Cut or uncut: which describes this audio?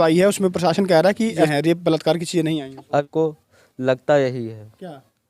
cut